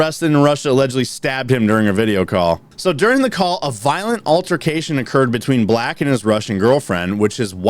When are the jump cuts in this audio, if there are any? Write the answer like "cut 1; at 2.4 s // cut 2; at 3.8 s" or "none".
cut 1; at 2.7 s